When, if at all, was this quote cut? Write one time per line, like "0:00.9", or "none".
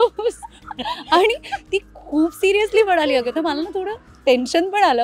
none